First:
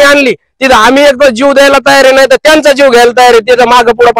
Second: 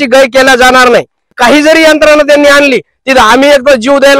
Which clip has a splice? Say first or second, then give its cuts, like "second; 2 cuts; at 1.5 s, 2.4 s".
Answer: second; 1 cut; at 1.3 s